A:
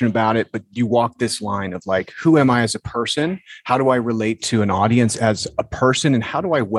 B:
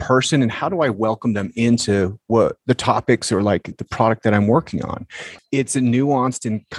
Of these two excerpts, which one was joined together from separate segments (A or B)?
B